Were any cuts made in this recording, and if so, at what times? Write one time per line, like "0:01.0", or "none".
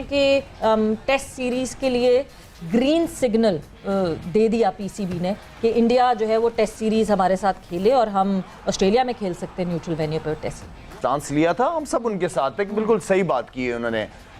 0:11.0